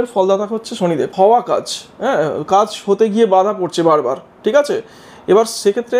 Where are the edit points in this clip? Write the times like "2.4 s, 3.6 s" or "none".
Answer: 1.1 s

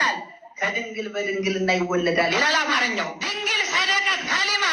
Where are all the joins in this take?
3.2 s

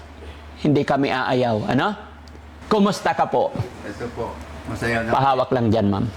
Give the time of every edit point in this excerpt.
2.5 s

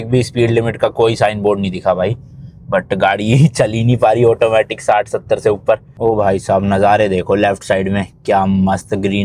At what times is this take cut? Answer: 6.0 s

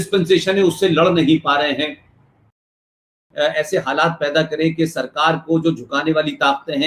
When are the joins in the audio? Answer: 3.0 s

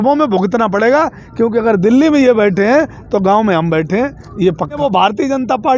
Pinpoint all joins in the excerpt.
4.8 s

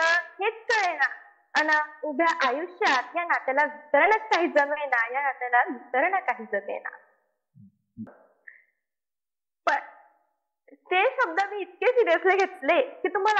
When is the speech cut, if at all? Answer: 8.1 s

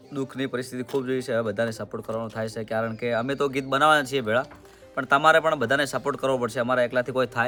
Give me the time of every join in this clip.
none

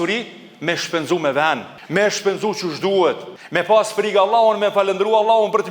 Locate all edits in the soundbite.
1.7 s, 3.3 s

